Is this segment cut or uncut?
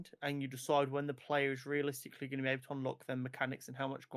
uncut